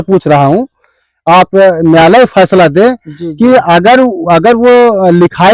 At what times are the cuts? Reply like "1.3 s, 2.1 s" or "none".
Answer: none